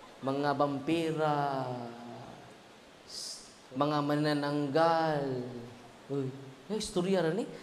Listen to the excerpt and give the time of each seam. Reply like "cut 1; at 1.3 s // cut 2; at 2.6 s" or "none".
cut 1; at 3.6 s